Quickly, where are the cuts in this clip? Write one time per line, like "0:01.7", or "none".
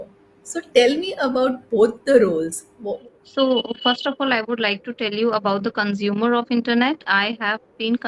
0:02.9